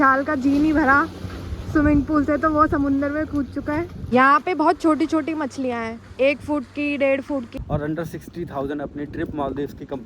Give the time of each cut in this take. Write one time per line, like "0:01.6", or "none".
0:04.0
0:07.5